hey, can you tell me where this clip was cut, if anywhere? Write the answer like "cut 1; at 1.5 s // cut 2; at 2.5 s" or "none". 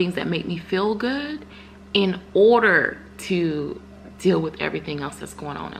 none